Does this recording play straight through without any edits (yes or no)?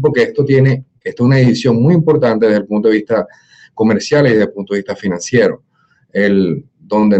yes